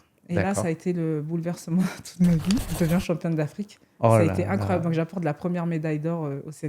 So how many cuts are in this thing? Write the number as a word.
one